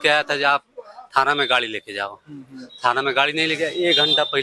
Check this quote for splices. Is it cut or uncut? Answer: uncut